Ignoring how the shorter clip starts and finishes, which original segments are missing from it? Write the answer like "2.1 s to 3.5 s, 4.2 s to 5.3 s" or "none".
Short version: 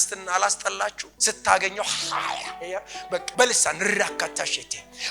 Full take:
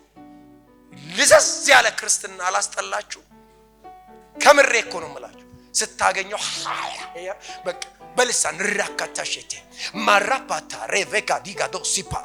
3.2 s to 5.6 s, 7.8 s to 8.1 s